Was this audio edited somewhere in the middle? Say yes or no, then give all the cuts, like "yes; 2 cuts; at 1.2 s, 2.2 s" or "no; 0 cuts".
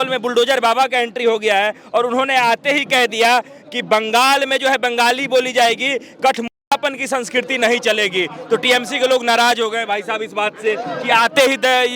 no; 0 cuts